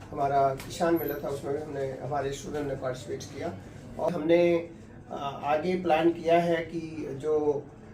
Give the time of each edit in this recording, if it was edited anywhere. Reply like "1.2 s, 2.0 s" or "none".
4.1 s

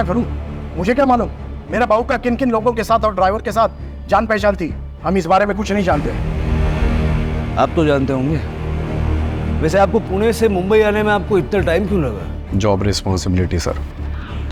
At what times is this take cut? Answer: none

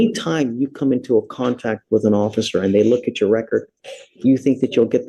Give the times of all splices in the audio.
none

